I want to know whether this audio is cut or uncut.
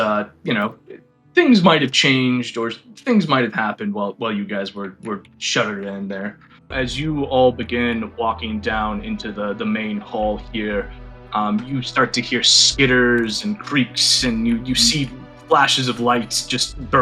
cut